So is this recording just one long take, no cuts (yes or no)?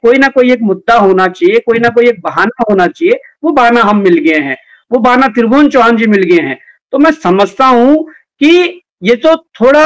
yes